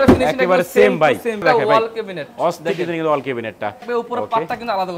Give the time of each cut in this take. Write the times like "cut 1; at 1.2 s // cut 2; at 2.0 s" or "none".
cut 1; at 1.4 s // cut 2; at 3.8 s